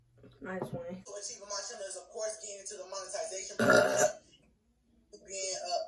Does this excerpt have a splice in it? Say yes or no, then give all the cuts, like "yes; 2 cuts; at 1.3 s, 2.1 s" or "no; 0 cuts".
yes; 1 cut; at 1.0 s